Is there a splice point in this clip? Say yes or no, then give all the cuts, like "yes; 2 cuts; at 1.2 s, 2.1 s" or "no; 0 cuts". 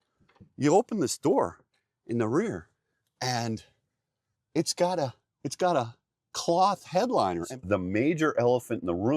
yes; 1 cut; at 7.5 s